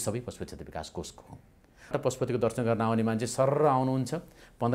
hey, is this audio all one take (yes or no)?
no